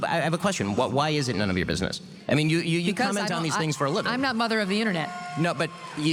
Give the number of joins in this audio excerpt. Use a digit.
0